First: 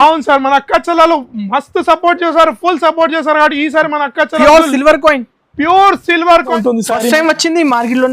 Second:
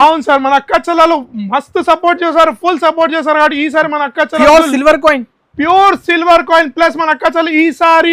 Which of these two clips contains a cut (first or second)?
first